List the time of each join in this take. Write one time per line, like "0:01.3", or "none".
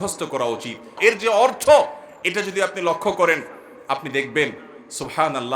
0:01.0